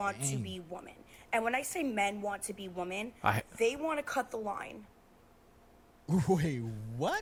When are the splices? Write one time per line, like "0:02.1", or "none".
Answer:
none